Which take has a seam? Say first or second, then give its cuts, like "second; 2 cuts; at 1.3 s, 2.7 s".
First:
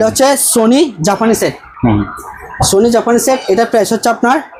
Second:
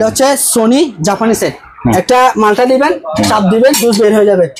second; 1 cut; at 1.8 s